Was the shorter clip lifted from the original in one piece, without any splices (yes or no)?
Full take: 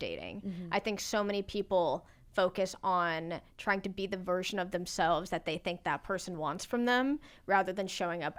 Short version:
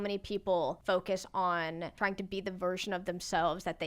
no